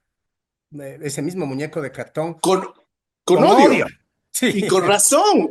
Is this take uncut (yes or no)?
yes